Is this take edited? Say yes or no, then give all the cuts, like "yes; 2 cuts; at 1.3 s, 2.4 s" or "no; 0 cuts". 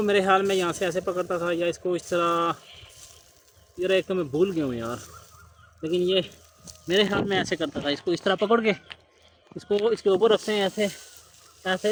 no; 0 cuts